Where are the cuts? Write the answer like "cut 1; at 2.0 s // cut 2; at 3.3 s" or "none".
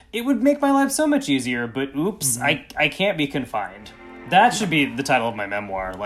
none